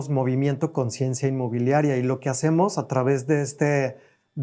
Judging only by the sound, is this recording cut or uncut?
uncut